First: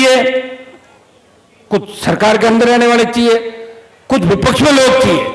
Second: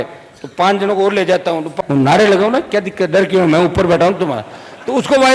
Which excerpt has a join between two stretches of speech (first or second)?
second